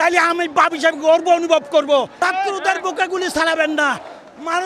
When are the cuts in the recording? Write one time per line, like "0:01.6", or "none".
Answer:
0:02.1